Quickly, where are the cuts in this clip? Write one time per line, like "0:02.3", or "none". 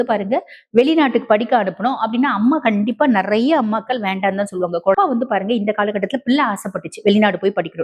0:04.9